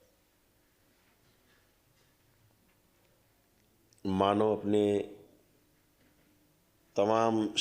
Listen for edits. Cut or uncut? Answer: uncut